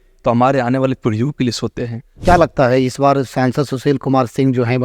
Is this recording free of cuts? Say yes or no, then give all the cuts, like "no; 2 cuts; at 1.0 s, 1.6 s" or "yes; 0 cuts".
no; 1 cut; at 2.1 s